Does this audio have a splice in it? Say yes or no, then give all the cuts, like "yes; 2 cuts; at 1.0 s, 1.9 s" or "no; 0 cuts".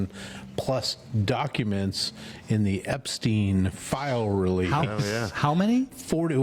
no; 0 cuts